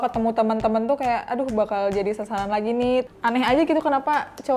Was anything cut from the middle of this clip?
yes; 1 cut; at 3.1 s

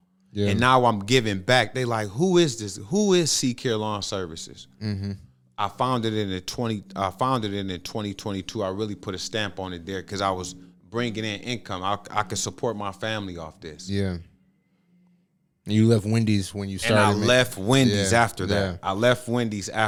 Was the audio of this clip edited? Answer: no; 0 cuts

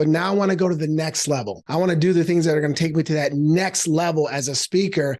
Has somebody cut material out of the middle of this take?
yes; 1 cut; at 1.6 s

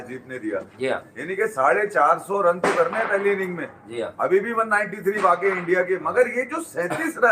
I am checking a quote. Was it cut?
no; 0 cuts

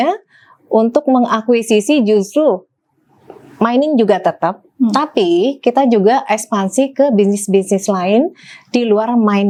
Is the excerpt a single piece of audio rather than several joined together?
yes; 0 cuts

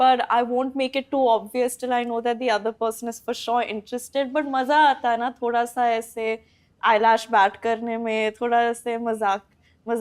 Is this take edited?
no; 0 cuts

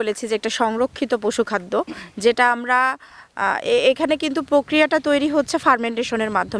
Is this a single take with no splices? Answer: yes; 0 cuts

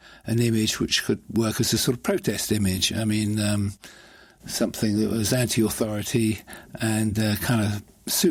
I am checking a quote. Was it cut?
no; 0 cuts

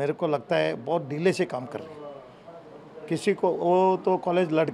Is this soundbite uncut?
yes; 0 cuts

